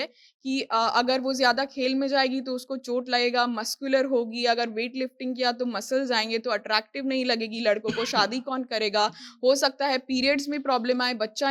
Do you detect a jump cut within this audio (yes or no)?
no